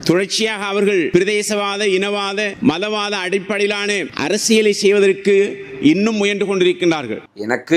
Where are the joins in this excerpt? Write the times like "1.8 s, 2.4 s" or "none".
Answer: 1.1 s, 2.5 s, 4.1 s